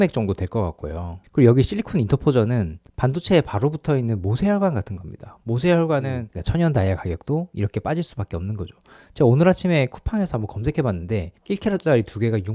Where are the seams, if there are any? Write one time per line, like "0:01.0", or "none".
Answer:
0:01.2
0:06.3